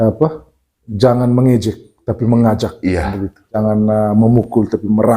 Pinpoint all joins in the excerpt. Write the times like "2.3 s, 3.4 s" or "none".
3.6 s